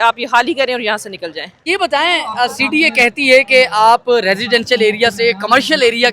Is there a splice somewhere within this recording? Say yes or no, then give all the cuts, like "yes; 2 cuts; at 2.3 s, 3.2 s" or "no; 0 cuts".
yes; 1 cut; at 1.7 s